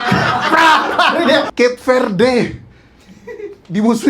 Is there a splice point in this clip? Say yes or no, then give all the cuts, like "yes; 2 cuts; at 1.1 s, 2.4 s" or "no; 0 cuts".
yes; 1 cut; at 1.5 s